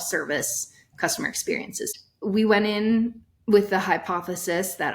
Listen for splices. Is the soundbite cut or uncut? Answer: cut